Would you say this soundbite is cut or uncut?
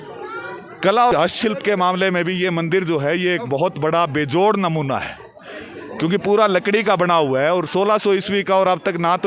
cut